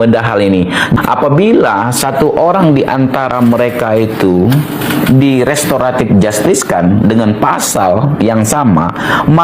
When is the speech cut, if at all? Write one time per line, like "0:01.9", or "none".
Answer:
0:01.0